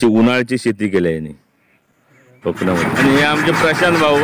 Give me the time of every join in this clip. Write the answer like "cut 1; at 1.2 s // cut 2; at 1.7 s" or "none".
cut 1; at 2.9 s